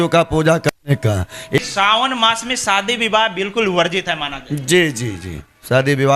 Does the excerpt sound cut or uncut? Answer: cut